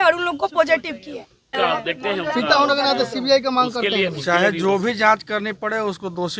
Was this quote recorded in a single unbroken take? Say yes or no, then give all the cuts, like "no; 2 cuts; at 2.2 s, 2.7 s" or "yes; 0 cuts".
no; 1 cut; at 1.5 s